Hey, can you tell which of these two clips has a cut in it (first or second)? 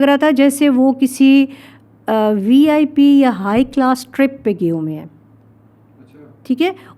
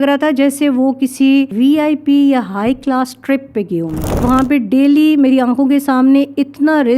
second